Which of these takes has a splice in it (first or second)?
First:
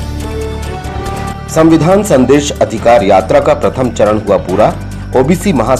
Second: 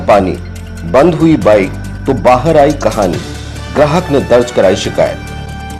first